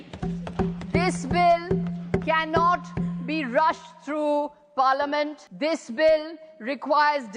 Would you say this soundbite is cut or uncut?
cut